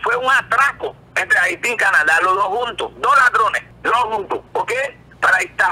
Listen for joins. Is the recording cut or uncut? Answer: cut